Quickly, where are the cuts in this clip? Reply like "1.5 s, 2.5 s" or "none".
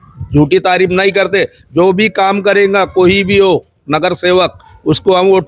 none